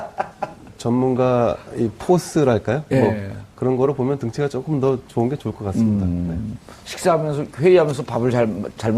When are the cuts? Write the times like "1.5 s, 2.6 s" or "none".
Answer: 2.1 s